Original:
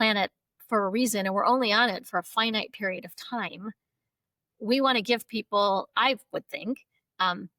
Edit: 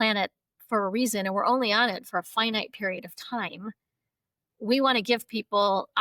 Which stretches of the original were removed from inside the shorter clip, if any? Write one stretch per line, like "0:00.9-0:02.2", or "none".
none